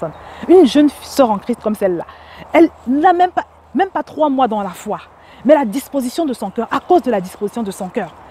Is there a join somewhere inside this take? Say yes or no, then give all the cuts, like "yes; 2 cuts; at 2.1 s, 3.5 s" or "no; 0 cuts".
no; 0 cuts